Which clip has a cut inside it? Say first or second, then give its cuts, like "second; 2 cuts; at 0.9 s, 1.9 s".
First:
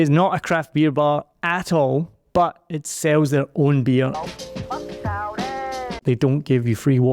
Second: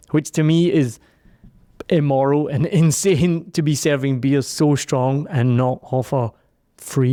first; 2 cuts; at 4.2 s, 6.0 s